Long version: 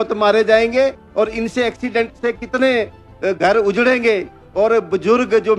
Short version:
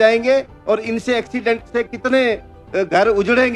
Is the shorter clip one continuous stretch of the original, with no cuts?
yes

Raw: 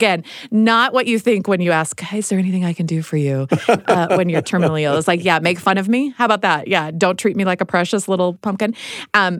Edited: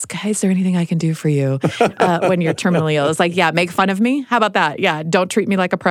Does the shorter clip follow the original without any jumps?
yes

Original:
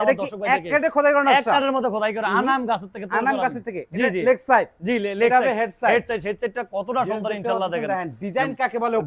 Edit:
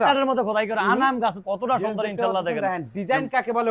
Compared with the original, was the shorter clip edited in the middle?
yes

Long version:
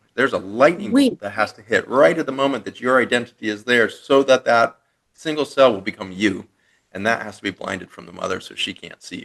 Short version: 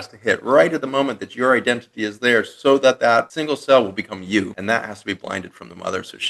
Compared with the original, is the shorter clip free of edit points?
no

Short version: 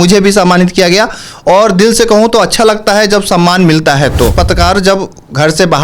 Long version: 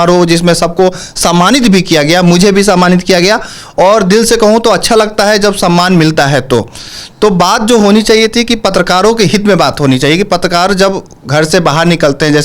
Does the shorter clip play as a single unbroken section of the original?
no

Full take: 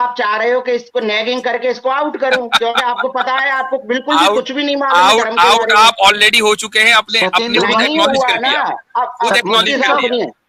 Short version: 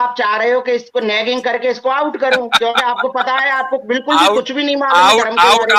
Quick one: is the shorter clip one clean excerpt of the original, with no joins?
yes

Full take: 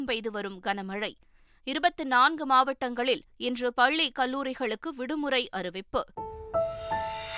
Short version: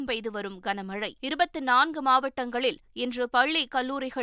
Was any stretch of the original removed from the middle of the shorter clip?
yes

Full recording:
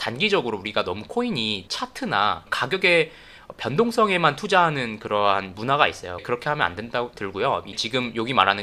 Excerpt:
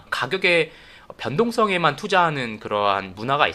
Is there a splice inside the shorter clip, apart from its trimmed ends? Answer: no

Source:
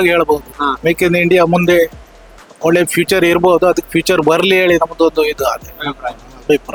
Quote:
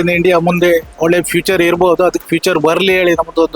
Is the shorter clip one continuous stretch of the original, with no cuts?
no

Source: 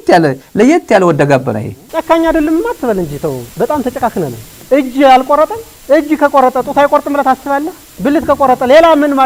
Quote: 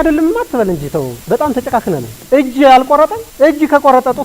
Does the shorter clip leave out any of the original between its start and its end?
yes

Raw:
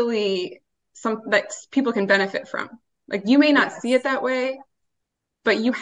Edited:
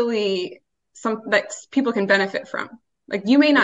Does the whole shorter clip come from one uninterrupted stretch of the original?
yes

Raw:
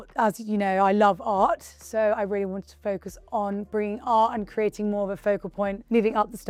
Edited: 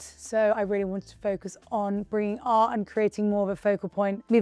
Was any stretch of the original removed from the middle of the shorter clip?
no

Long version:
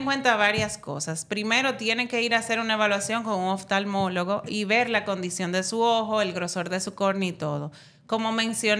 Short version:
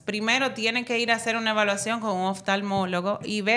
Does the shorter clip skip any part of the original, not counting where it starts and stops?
no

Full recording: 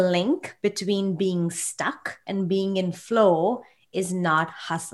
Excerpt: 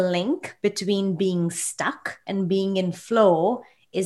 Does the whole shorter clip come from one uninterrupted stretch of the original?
yes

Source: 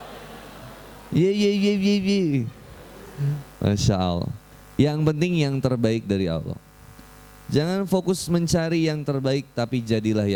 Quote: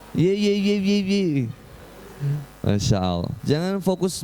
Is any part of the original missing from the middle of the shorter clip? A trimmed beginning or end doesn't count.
yes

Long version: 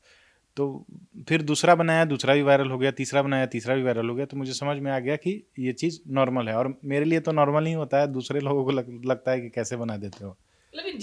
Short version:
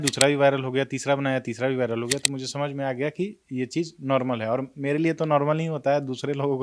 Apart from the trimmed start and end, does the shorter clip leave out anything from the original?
no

